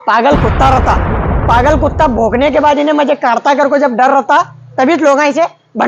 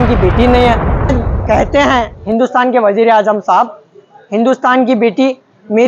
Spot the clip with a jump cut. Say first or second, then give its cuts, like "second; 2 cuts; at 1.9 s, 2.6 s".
second; 1 cut; at 1.3 s